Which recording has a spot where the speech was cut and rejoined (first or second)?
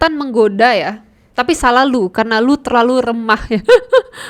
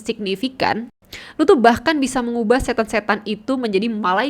second